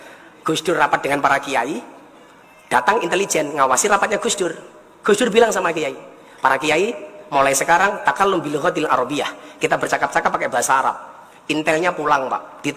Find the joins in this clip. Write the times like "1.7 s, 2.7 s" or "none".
none